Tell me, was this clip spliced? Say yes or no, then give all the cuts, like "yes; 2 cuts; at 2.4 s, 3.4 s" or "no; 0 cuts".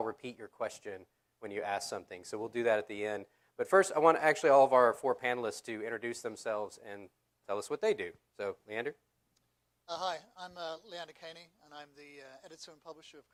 no; 0 cuts